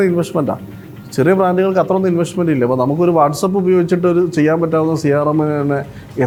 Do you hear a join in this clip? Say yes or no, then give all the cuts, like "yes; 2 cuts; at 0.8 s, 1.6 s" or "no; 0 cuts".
no; 0 cuts